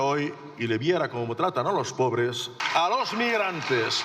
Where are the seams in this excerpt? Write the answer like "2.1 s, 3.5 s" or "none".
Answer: 2.5 s